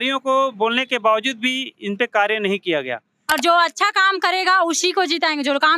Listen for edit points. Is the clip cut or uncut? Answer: cut